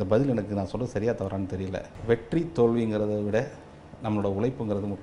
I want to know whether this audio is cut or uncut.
cut